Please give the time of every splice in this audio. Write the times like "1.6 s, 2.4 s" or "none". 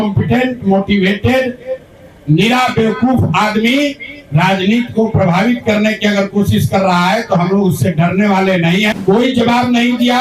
8.9 s

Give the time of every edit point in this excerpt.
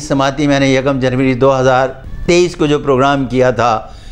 2.1 s

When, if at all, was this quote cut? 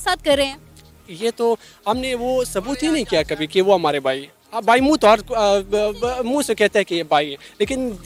none

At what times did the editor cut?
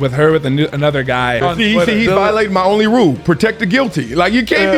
1.4 s

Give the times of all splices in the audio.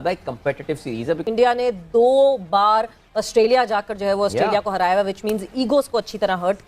1.2 s

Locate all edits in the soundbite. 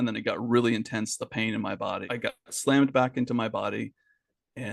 2.0 s

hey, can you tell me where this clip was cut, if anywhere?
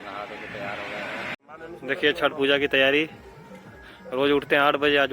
1.4 s

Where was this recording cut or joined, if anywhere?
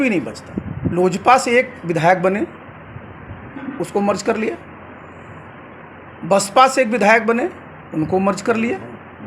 0.9 s

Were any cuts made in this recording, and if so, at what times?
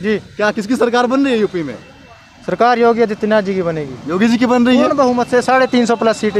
none

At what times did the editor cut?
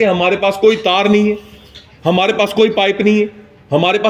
none

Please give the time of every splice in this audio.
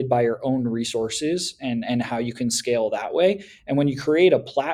none

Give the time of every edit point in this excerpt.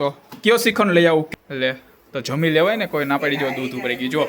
1.3 s

